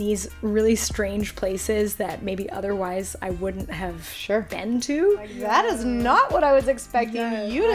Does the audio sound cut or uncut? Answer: cut